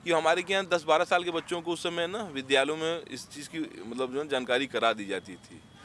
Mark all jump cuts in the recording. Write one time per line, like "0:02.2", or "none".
none